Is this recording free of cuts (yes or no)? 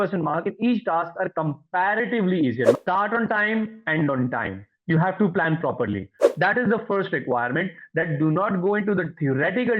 no